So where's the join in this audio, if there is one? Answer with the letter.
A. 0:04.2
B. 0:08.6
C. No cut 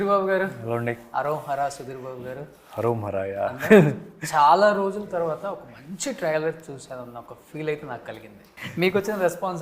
B